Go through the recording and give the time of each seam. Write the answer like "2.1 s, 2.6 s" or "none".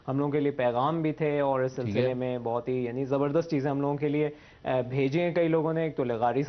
none